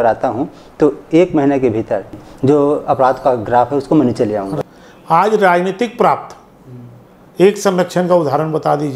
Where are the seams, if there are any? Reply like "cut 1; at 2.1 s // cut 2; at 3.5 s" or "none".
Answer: cut 1; at 2.1 s // cut 2; at 4.5 s